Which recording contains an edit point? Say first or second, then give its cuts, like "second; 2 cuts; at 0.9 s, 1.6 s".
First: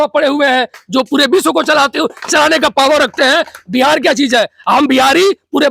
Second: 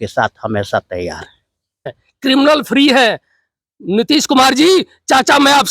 second; 1 cut; at 2.0 s